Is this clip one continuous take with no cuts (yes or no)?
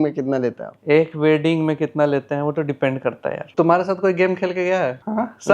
no